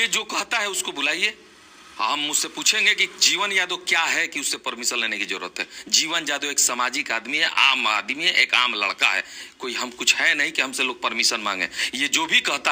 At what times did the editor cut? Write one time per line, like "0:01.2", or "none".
none